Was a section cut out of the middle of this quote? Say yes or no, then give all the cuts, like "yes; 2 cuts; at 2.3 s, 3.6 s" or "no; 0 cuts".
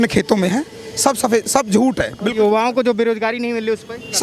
no; 0 cuts